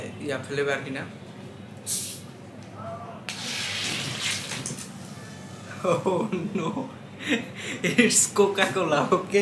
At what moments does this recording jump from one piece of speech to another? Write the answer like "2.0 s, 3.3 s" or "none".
none